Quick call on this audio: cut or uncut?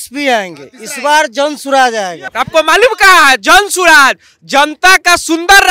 cut